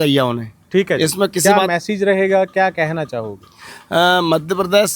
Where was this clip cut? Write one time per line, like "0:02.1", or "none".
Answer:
0:01.4

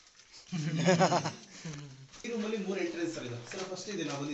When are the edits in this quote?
0:02.2

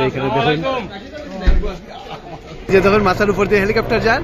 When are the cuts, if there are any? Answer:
0:02.7

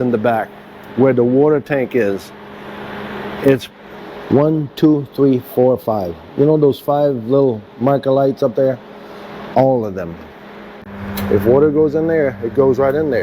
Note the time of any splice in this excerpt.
0:03.7
0:10.7

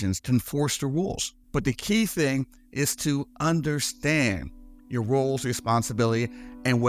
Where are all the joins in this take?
0:01.3

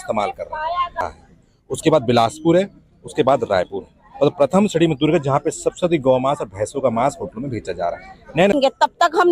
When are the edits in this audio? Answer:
0:01.0
0:08.5

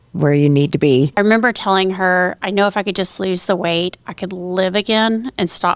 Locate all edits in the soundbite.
0:01.1

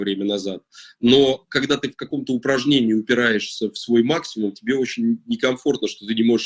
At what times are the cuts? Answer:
none

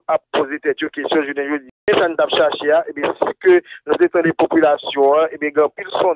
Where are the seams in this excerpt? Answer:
0:01.7

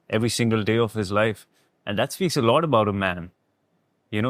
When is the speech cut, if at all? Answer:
none

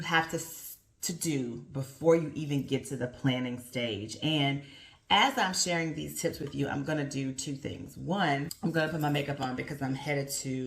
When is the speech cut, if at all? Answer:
0:08.5

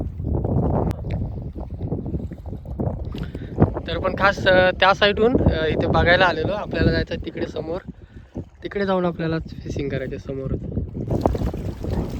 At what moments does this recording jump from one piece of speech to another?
0:00.9
0:11.1

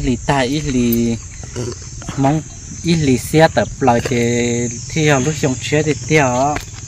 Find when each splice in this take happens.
none

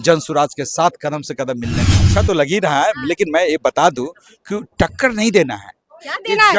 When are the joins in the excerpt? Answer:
0:02.0

